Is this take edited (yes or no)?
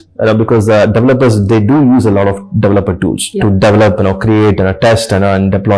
no